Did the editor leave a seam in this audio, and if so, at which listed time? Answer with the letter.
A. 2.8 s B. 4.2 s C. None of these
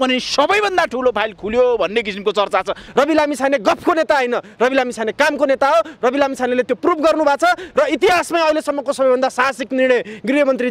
A